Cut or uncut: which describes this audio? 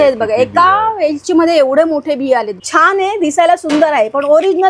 cut